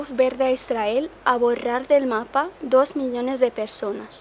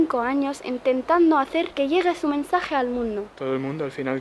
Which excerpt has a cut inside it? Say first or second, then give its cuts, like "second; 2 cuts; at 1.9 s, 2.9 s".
second; 2 cuts; at 1.7 s, 3.3 s